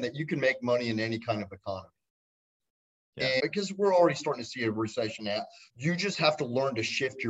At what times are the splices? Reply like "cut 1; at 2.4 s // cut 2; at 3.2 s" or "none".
cut 1; at 3.4 s // cut 2; at 5.6 s